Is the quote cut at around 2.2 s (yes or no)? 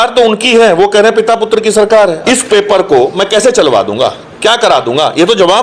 yes